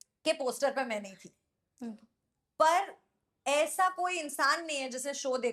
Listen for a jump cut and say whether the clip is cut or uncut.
uncut